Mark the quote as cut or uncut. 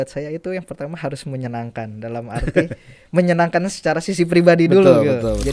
uncut